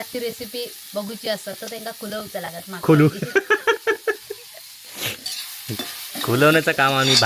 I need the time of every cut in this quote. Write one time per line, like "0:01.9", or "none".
none